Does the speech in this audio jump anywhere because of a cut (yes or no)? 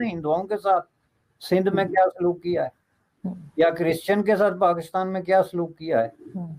no